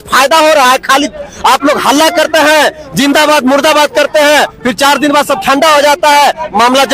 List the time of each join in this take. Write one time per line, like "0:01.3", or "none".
none